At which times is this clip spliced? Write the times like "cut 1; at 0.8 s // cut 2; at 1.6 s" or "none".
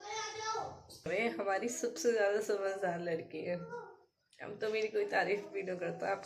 cut 1; at 1.1 s